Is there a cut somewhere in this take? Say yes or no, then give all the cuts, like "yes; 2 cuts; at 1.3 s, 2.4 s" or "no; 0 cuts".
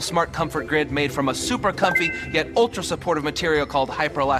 no; 0 cuts